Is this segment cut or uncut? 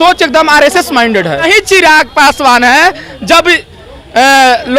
cut